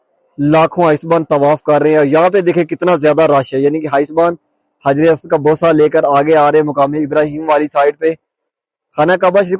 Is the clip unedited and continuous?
yes; 0 cuts

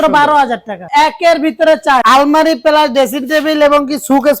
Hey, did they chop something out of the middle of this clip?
yes; 2 cuts; at 0.8 s, 2.0 s

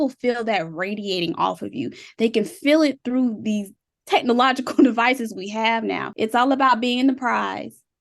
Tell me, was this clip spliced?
yes; 1 cut; at 6.1 s

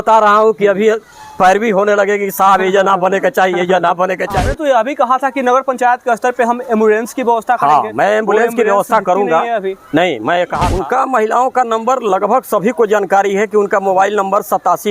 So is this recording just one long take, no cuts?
no; 2 cuts; at 4.4 s, 10.6 s

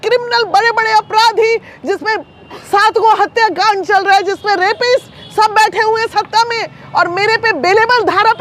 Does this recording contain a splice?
no; 0 cuts

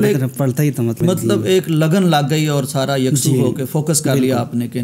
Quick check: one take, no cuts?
yes; 0 cuts

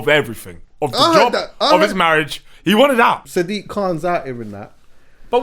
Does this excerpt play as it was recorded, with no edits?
no; 1 cut; at 3.2 s

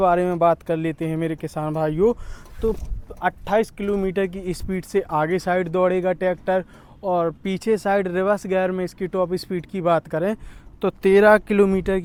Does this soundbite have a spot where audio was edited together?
no; 0 cuts

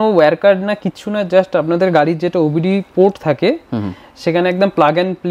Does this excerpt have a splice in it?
no; 0 cuts

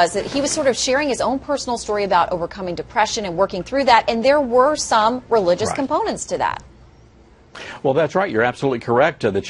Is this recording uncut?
no; 1 cut; at 5.7 s

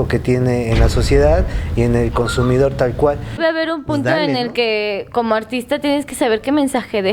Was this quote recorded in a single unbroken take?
no; 1 cut; at 3.4 s

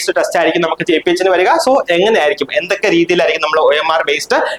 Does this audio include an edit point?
no; 0 cuts

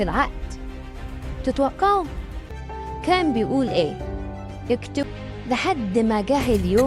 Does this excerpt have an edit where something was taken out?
yes; 1 cut; at 5.1 s

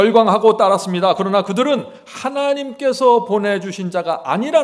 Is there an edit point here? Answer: no; 0 cuts

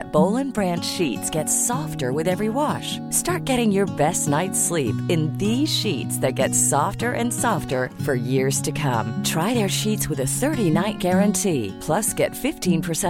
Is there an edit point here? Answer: no; 0 cuts

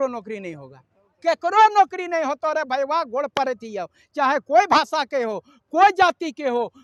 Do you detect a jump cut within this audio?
no; 0 cuts

